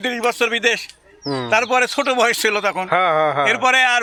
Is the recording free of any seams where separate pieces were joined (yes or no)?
yes